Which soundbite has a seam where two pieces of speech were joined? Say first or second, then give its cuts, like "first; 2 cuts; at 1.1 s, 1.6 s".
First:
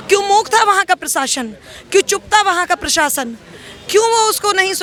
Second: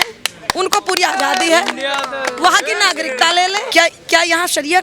second; 1 cut; at 3.7 s